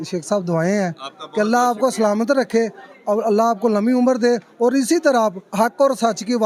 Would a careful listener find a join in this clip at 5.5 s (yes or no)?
no